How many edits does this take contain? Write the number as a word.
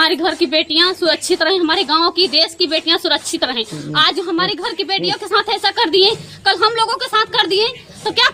zero